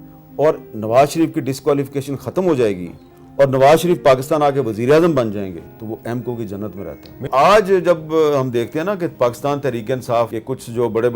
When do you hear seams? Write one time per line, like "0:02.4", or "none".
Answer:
0:05.7
0:07.3
0:10.4